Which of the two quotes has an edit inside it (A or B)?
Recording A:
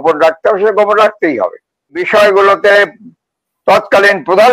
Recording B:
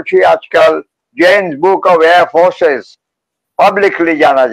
A